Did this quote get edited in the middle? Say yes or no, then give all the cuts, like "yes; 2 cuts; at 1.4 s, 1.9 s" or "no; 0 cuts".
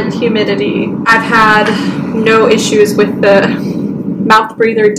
yes; 1 cut; at 1.0 s